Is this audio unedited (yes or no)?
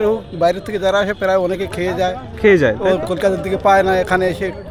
yes